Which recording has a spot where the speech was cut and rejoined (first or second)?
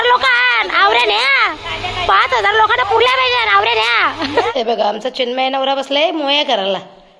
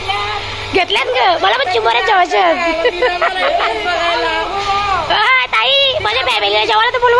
first